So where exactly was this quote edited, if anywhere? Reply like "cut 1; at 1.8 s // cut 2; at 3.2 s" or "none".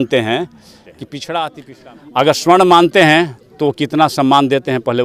cut 1; at 1.7 s